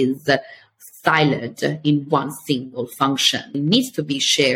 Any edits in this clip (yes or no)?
yes